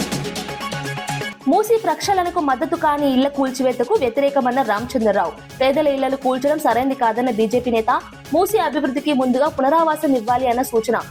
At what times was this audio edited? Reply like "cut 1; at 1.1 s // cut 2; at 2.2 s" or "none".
cut 1; at 1.3 s